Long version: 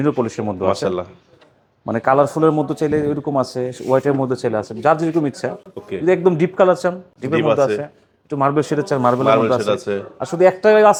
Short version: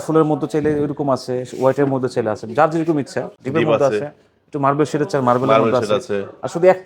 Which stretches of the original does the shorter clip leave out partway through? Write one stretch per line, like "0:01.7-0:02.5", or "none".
0:05.6-0:07.1